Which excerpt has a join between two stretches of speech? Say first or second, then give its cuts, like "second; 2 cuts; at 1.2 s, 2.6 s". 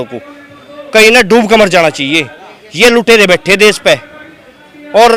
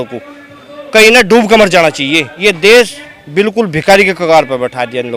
second; 1 cut; at 2.3 s